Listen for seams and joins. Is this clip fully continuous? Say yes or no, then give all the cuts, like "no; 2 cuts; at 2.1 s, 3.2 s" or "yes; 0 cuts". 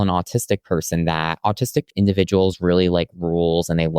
no; 1 cut; at 1.9 s